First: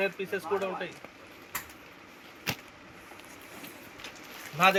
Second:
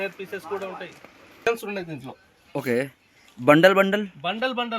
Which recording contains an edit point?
second; 1 cut; at 1.5 s

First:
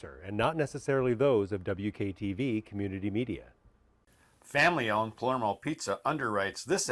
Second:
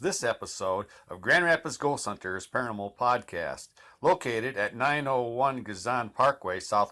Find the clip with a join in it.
first; 1 cut; at 4.4 s

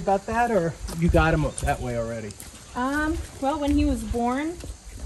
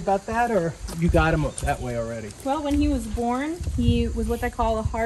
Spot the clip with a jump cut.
second; 2 cuts; at 2.3 s, 3.6 s

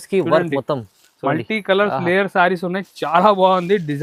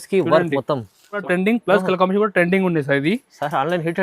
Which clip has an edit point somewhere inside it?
second; 1 cut; at 1.2 s

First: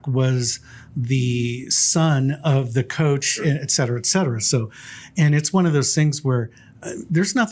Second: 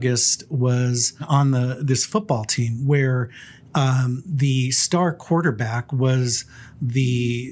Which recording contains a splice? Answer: second; 1 cut; at 1.2 s

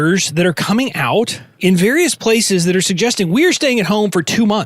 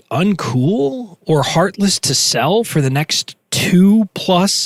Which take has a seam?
first; 1 cut; at 1.4 s

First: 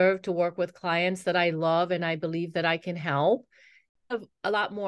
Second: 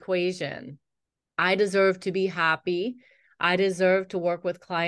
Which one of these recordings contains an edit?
first; 1 cut; at 3.9 s

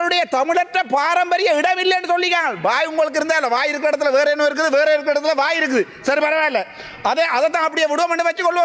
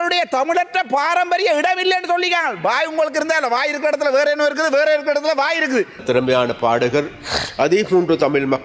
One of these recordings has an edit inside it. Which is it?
second; 1 cut; at 6.0 s

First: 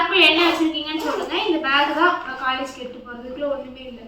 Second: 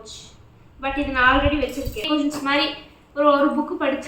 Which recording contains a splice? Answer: second; 1 cut; at 2.1 s

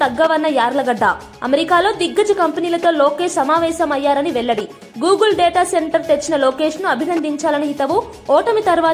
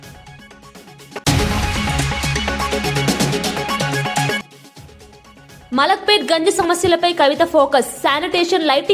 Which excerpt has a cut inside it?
second; 2 cuts; at 1.2 s, 4.4 s

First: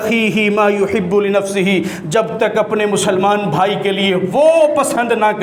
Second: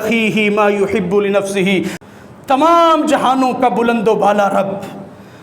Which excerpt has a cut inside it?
second; 1 cut; at 2.0 s

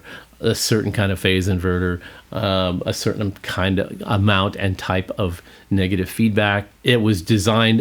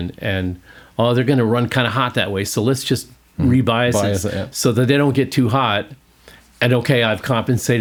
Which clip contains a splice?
first; 1 cut; at 6.7 s

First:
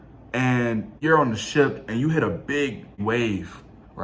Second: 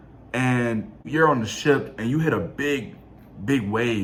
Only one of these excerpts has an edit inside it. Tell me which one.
first; 2 cuts; at 0.9 s, 3.0 s

